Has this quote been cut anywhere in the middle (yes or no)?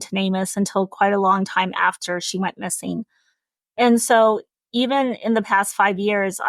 yes